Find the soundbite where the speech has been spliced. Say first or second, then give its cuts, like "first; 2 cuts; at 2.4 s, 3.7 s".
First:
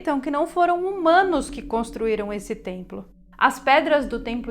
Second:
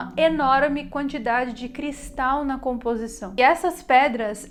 first; 1 cut; at 3.1 s